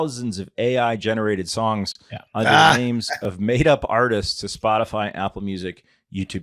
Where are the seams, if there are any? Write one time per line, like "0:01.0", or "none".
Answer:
none